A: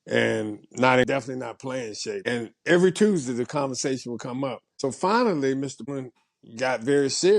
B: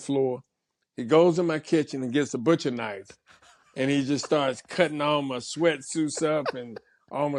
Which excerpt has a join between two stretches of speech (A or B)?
A